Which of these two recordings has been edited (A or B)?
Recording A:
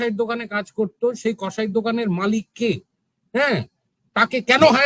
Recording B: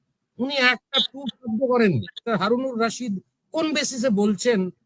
B